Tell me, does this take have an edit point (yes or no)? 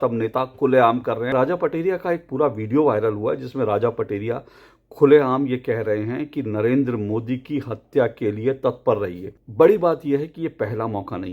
yes